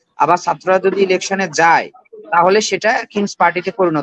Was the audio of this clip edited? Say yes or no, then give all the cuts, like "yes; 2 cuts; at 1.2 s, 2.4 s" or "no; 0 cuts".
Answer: no; 0 cuts